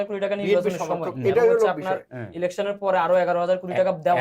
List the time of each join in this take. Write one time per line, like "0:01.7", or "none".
none

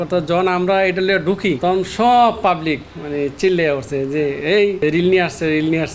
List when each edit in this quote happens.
0:01.6
0:04.8

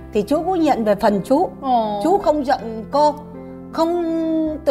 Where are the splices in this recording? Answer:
none

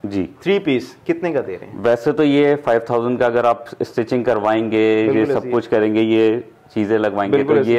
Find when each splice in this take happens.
none

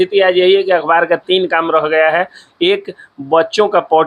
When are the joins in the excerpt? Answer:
none

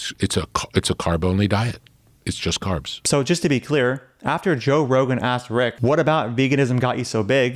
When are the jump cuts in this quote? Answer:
0:02.9
0:05.8

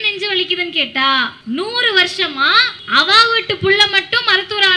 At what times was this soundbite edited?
0:01.3
0:02.7

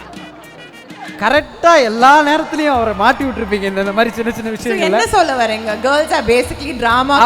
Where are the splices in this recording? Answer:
0:01.2

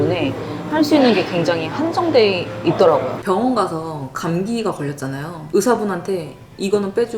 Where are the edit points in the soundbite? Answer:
0:03.1

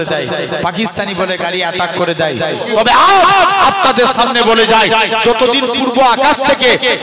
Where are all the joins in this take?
0:02.6

